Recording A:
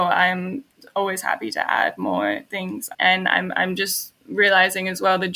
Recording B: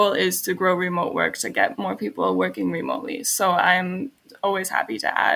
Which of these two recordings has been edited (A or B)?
A